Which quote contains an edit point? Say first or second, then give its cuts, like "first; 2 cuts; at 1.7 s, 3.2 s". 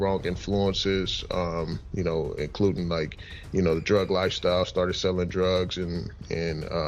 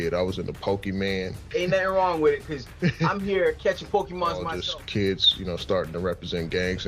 second; 2 cuts; at 1.4 s, 4.5 s